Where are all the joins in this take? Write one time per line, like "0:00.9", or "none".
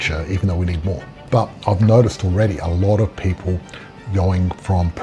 0:01.2